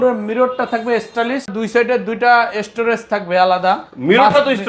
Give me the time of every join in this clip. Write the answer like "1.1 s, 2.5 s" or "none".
1.5 s

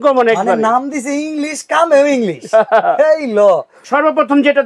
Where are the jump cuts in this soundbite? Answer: 3.8 s

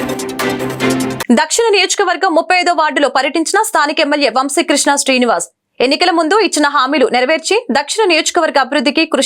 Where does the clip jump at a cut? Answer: 1.2 s

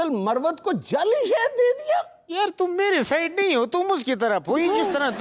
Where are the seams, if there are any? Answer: none

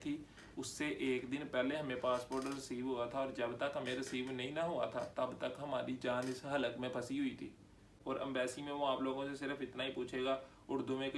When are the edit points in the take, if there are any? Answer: 7.9 s

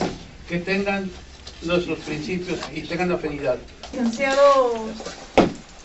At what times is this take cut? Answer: 3.9 s

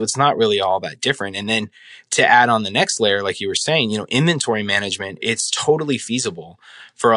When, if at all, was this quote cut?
5.2 s

